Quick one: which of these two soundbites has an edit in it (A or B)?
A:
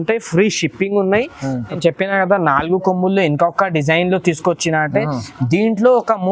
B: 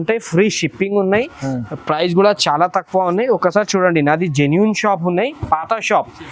A